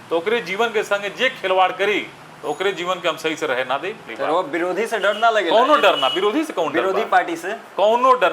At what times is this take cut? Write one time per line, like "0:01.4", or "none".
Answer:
0:04.1